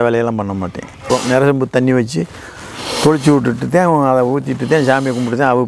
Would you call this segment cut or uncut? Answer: cut